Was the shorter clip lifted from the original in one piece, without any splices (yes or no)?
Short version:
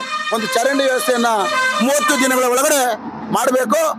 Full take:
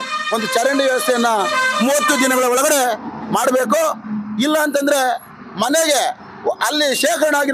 yes